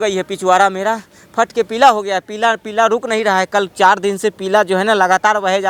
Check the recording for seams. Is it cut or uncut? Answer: uncut